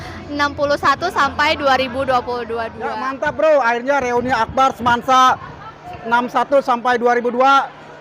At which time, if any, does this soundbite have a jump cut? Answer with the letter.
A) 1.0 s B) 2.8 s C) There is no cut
B